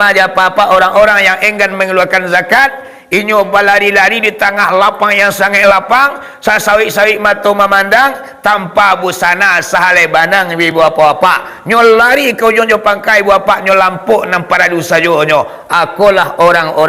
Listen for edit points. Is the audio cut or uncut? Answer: uncut